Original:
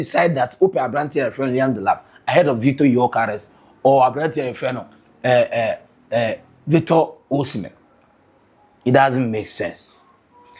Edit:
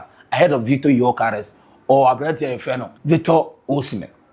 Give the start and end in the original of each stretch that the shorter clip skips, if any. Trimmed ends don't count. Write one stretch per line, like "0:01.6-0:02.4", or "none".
0:04.9-0:06.5